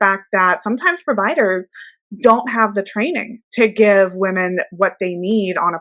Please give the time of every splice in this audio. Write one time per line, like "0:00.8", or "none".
none